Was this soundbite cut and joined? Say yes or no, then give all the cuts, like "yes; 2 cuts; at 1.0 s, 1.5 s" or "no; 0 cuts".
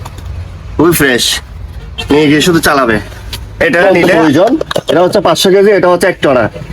yes; 1 cut; at 4.2 s